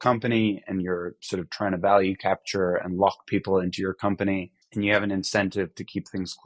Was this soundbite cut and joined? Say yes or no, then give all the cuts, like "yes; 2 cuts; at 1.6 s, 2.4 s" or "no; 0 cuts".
yes; 1 cut; at 4.6 s